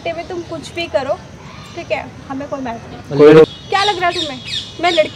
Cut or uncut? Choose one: cut